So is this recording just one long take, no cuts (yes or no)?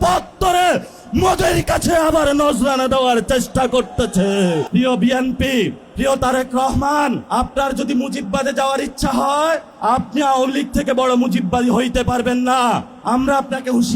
no